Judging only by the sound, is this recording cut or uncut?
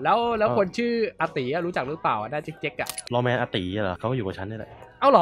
cut